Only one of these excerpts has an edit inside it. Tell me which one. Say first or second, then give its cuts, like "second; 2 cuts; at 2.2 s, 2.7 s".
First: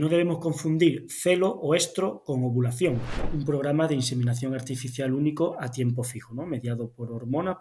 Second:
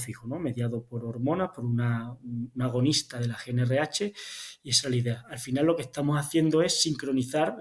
first; 1 cut; at 3.3 s